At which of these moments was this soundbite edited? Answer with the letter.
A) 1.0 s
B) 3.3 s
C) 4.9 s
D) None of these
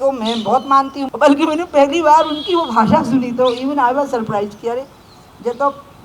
A